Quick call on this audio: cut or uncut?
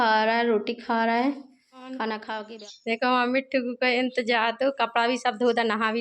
cut